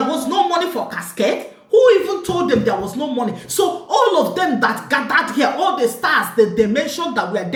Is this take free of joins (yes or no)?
yes